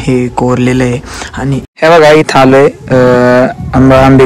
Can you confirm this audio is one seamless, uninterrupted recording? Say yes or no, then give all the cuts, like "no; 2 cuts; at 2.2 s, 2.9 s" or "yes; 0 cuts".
no; 1 cut; at 1.7 s